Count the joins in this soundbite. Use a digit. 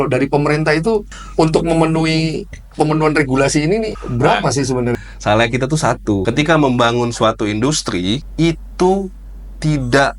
5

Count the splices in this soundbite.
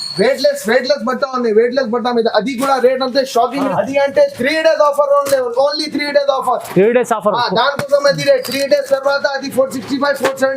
1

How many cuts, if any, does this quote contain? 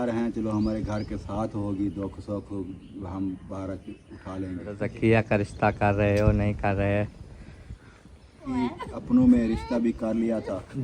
2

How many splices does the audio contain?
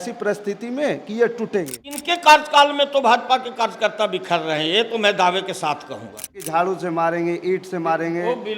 2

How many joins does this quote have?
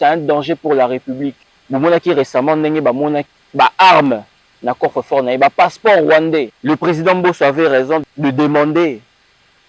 4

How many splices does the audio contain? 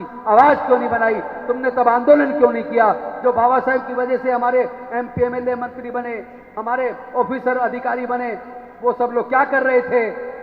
0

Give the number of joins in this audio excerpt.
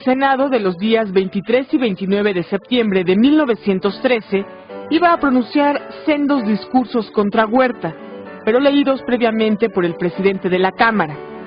1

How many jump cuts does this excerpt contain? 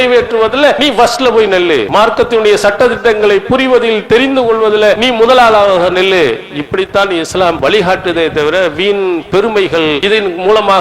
5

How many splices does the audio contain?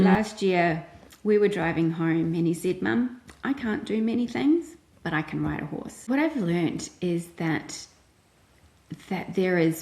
1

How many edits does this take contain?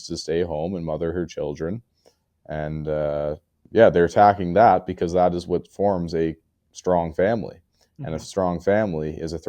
1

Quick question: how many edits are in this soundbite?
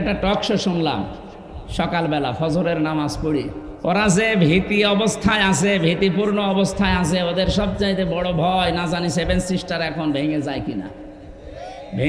1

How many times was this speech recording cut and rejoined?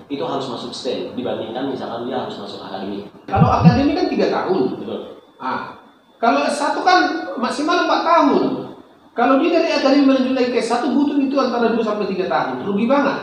1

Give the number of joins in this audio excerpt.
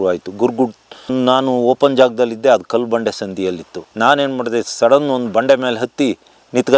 0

